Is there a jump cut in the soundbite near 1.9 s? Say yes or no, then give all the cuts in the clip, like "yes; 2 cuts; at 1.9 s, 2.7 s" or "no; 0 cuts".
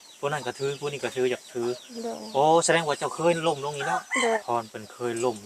no; 1 cut; at 4.4 s